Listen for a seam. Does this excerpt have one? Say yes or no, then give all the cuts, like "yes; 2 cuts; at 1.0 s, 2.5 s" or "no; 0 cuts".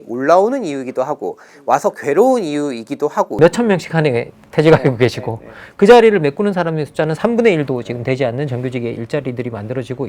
yes; 1 cut; at 3.4 s